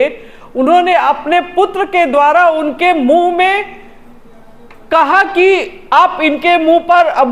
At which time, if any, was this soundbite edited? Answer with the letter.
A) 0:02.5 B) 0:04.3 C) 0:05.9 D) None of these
D